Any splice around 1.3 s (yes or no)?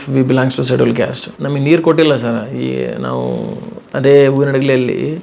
yes